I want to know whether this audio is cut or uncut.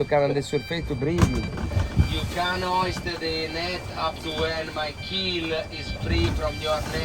cut